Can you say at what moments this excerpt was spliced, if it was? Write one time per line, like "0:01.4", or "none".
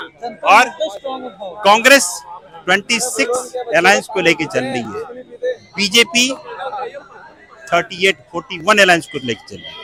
none